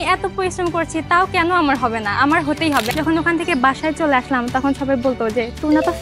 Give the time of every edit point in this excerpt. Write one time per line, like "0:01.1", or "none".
0:02.9